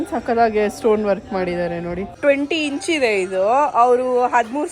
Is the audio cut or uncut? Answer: cut